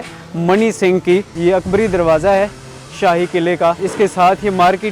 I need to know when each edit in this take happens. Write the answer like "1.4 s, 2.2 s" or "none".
1.3 s, 3.9 s